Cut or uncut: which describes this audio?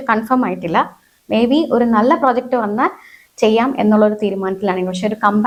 uncut